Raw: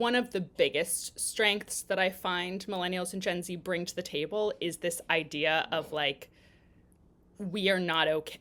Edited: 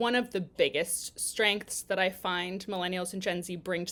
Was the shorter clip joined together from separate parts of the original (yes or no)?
no